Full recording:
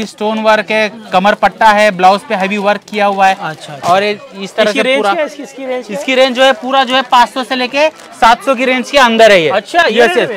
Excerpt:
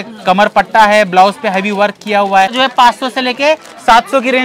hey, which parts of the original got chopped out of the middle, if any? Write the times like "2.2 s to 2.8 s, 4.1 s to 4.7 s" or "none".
3.4 s to 6.9 s